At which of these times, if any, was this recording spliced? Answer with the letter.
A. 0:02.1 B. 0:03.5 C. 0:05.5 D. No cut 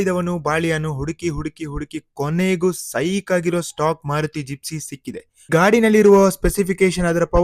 C